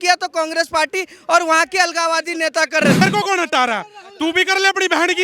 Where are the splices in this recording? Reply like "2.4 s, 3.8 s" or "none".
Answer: 3.0 s